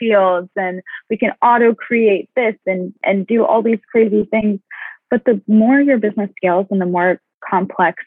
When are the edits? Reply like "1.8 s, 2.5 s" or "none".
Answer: 4.3 s